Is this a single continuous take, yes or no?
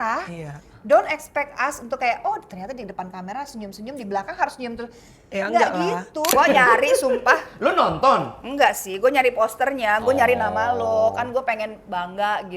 no